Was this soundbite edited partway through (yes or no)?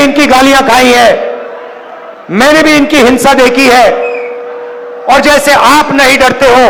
no